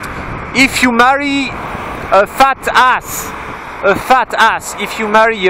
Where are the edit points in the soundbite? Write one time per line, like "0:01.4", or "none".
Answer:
0:04.3